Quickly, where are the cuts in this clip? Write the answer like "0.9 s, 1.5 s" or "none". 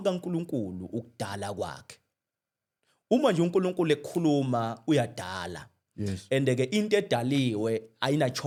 none